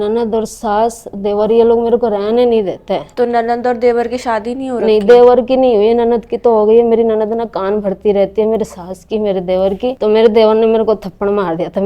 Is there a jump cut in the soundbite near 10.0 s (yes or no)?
yes